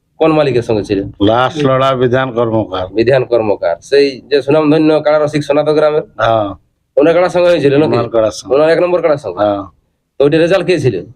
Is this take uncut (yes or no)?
no